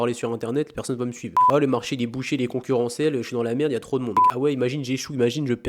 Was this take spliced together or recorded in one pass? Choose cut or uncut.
cut